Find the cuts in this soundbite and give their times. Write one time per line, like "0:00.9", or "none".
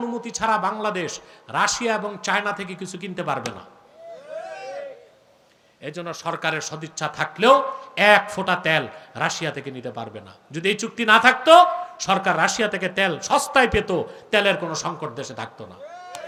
none